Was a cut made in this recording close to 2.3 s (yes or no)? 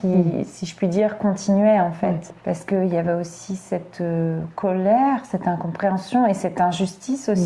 yes